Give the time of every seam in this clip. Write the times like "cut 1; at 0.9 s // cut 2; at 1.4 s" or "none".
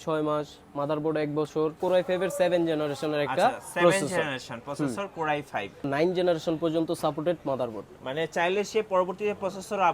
cut 1; at 1.8 s // cut 2; at 5.9 s